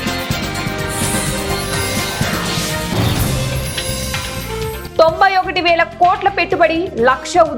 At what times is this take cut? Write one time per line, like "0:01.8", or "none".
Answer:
none